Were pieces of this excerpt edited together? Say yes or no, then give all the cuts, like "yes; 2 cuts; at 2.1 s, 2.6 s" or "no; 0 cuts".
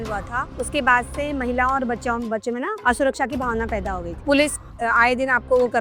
yes; 1 cut; at 4.2 s